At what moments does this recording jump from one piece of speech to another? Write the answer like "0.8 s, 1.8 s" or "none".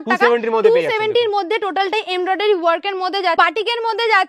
3.4 s